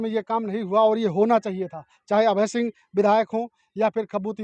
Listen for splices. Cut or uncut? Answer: uncut